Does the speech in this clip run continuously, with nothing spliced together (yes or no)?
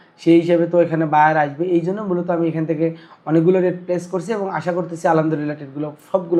yes